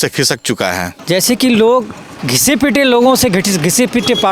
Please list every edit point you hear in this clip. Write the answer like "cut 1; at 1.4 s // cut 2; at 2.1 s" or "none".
cut 1; at 0.9 s // cut 2; at 2.3 s